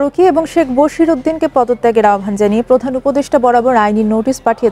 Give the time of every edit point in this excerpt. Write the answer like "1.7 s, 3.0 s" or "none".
none